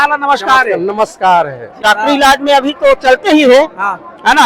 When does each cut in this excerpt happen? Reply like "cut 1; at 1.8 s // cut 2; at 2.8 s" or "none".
cut 1; at 1.8 s